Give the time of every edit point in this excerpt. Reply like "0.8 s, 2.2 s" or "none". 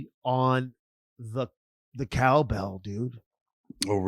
none